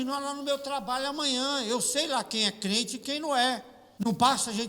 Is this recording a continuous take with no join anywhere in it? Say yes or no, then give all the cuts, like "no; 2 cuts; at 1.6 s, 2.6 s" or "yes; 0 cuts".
no; 1 cut; at 3.8 s